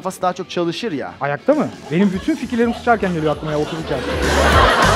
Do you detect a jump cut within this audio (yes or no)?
no